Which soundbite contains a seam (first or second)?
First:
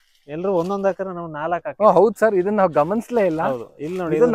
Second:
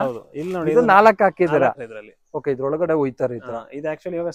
second